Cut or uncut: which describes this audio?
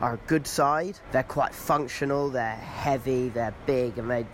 cut